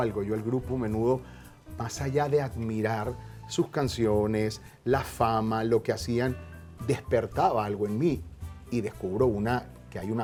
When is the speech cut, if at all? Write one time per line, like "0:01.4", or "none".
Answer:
none